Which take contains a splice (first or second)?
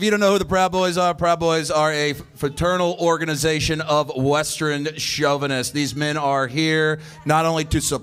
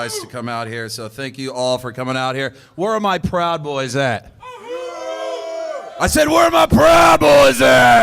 second